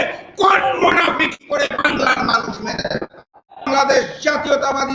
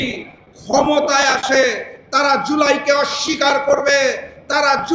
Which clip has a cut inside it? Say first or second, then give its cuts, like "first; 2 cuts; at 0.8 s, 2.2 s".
first; 1 cut; at 3.7 s